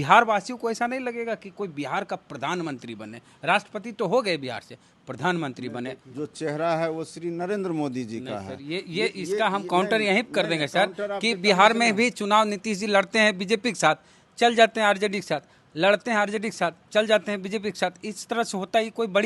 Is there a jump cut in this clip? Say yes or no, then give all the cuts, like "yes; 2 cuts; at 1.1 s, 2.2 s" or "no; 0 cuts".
yes; 1 cut; at 6.0 s